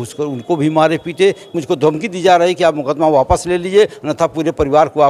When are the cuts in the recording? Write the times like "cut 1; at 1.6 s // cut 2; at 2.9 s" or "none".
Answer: cut 1; at 1.5 s